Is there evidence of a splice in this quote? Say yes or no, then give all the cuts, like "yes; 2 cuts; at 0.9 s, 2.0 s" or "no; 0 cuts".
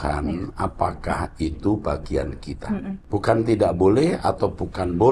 yes; 1 cut; at 3.0 s